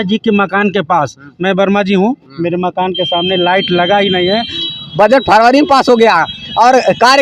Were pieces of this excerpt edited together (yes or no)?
yes